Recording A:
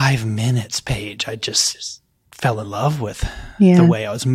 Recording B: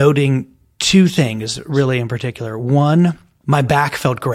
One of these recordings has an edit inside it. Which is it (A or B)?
B